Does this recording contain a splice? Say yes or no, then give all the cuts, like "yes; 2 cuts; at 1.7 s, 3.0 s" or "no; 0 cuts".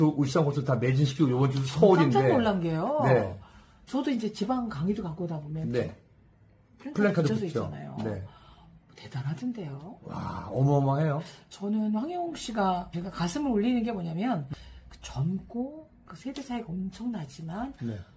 yes; 1 cut; at 14.5 s